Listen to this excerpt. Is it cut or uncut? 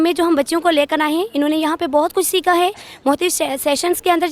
uncut